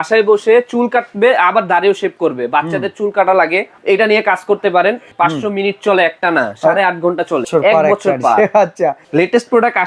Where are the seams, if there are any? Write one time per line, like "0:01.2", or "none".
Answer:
0:05.1
0:07.5
0:09.0